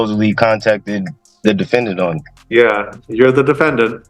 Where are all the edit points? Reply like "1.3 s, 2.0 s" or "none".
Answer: 1.2 s, 2.3 s